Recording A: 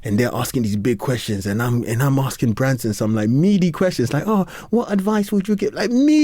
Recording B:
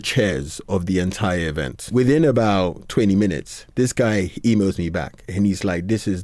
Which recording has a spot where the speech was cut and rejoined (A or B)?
B